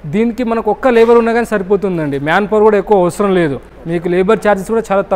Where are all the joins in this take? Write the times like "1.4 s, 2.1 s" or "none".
none